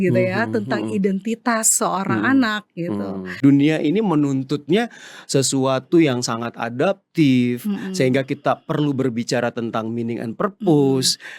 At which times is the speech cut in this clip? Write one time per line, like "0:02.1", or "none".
0:03.4